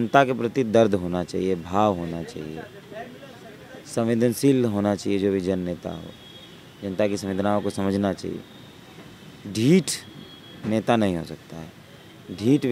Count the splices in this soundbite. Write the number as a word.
zero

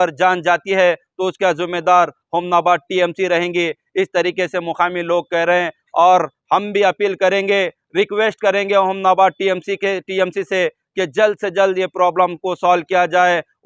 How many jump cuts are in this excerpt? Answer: zero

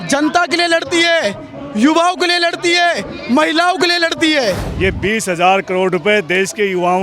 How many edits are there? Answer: one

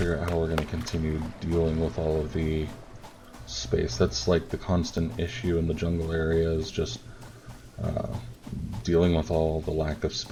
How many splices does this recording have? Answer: zero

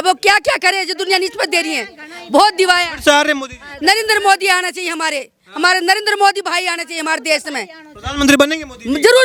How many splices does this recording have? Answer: zero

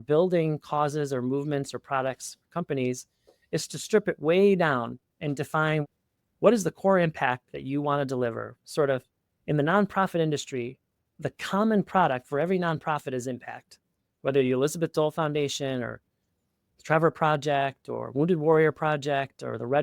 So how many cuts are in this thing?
one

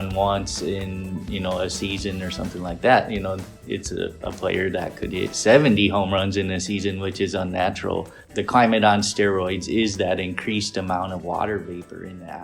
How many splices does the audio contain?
one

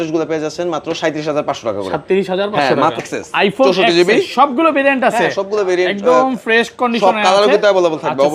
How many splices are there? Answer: one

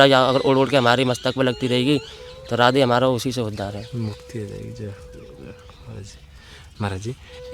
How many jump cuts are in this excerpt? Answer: zero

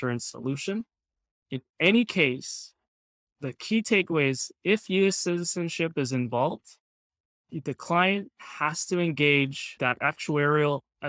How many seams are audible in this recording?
two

